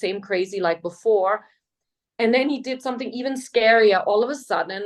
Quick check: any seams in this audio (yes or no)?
no